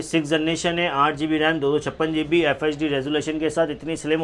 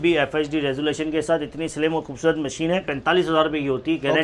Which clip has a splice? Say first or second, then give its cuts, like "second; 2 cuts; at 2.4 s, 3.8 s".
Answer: second; 1 cut; at 2.9 s